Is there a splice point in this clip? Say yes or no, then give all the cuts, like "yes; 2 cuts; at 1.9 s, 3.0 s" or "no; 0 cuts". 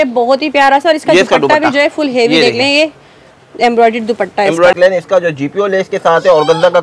yes; 1 cut; at 4.7 s